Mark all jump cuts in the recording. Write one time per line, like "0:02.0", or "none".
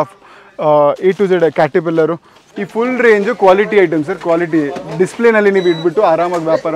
0:02.3

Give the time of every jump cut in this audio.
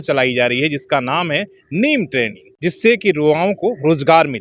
0:02.4

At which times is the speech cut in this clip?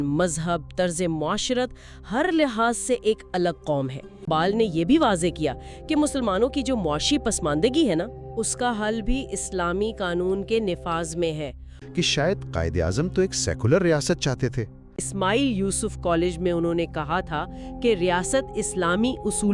0:04.1
0:11.7
0:15.0

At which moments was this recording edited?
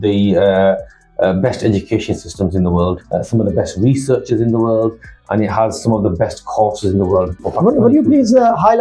0:03.0
0:07.4

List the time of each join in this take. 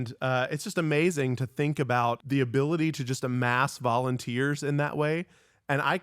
0:02.2

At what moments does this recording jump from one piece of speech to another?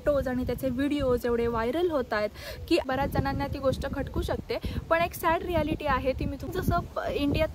0:02.8
0:06.4

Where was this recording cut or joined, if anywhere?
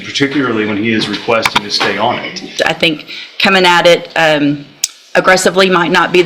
0:02.5

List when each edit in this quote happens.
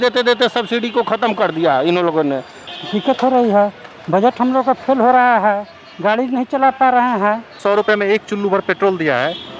0:02.6
0:07.6

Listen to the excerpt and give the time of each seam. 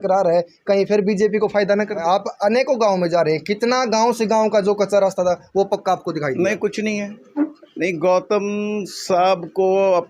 0:02.0
0:07.2

